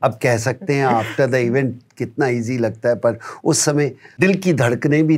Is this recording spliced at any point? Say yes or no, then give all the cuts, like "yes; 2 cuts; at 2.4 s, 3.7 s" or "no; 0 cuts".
yes; 1 cut; at 4.2 s